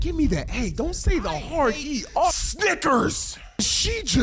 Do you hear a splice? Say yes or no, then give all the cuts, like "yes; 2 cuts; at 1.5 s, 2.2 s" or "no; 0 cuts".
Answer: no; 0 cuts